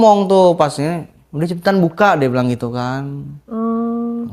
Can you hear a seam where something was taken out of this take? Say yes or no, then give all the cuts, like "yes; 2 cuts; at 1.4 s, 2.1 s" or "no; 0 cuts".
no; 0 cuts